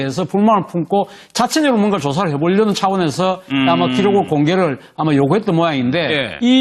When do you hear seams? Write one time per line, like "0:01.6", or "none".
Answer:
none

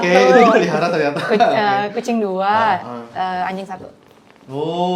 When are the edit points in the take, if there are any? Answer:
none

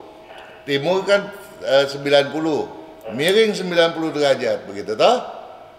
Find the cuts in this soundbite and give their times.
none

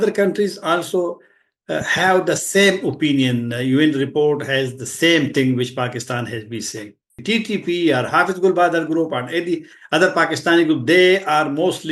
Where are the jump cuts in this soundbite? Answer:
0:07.2

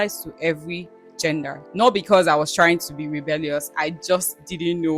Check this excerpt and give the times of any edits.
0:01.6

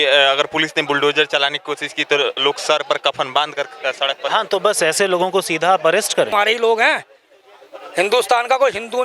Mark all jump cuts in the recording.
0:06.3

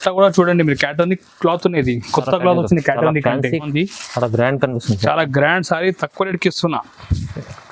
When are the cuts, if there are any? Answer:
0:03.7

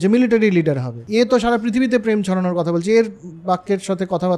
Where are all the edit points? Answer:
0:00.9

